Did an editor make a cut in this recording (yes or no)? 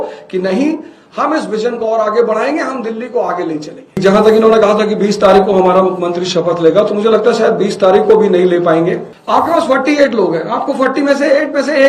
yes